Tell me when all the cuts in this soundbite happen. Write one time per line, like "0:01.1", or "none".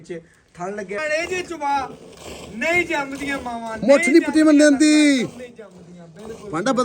0:01.0